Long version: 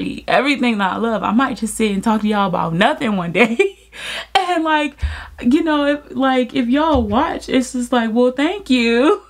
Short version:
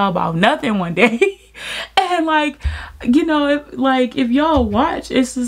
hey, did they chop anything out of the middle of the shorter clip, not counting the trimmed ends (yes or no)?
no